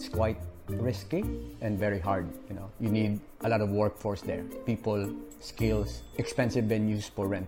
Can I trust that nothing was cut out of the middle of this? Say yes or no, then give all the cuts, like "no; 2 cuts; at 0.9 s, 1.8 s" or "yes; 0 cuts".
no; 2 cuts; at 3.3 s, 6.0 s